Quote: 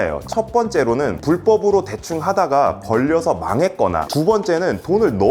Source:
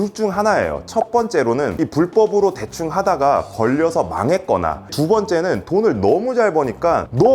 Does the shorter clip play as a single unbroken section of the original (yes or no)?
no